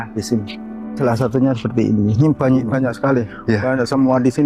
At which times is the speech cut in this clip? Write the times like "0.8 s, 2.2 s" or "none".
1.0 s